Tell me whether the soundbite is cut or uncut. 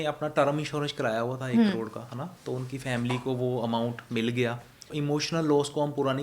cut